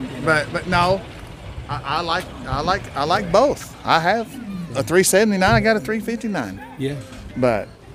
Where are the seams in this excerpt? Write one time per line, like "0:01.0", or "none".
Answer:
none